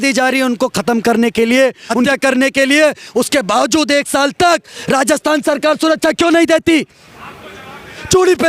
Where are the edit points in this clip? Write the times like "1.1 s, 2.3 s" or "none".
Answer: 2.1 s